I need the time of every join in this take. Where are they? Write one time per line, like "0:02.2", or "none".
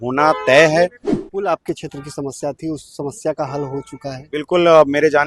0:01.0